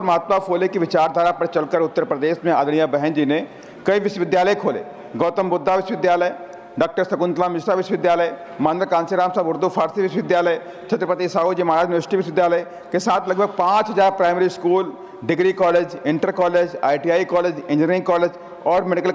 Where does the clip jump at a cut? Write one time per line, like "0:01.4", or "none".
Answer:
none